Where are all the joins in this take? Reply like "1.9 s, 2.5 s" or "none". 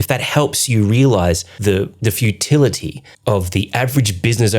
1.8 s, 3.1 s